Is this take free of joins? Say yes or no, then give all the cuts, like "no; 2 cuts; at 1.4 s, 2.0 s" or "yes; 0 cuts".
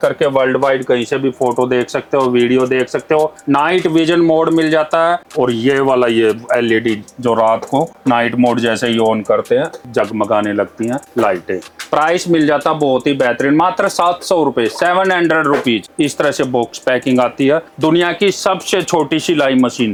yes; 0 cuts